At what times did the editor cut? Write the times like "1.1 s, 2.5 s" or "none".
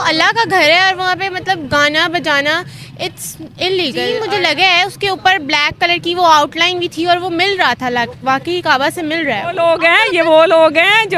4.2 s, 9.6 s